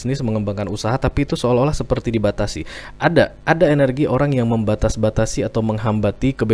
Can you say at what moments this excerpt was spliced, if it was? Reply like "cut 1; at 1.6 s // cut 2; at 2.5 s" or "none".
none